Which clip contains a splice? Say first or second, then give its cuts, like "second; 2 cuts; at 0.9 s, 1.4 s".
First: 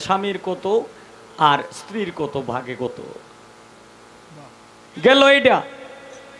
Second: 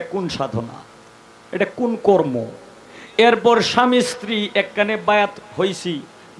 first; 1 cut; at 3.7 s